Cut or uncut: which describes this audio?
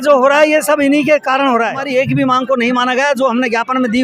cut